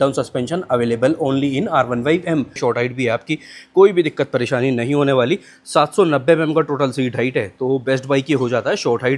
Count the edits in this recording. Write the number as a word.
one